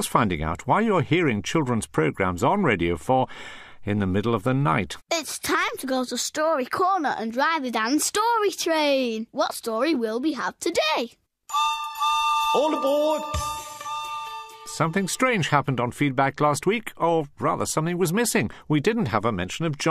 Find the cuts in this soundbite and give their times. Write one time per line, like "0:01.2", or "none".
none